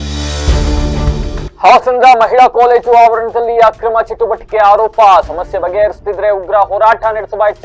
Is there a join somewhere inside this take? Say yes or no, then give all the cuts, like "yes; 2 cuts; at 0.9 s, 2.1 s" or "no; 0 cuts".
yes; 1 cut; at 1.5 s